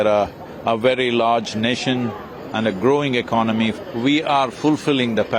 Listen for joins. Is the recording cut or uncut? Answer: cut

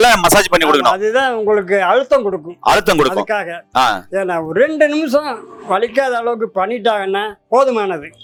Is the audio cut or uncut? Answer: uncut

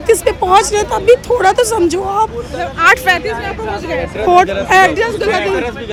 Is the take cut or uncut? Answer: uncut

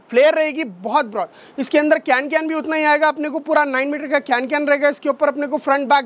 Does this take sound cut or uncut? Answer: uncut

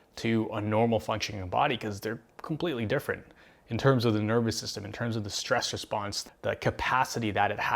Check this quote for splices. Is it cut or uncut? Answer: cut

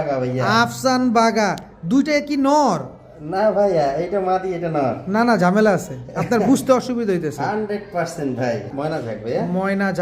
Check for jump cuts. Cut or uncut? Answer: cut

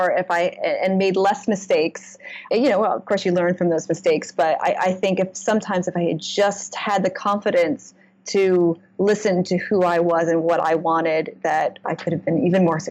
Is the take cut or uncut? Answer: cut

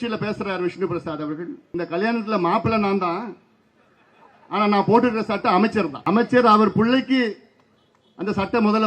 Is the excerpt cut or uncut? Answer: cut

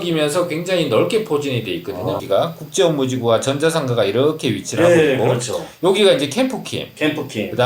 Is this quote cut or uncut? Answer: cut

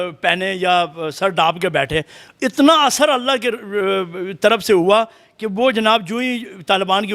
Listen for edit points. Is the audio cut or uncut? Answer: uncut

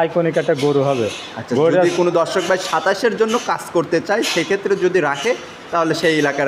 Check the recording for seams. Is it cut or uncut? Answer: uncut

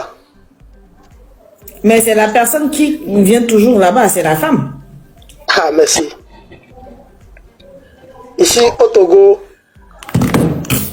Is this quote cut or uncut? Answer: uncut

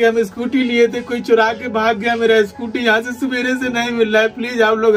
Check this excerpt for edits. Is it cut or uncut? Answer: uncut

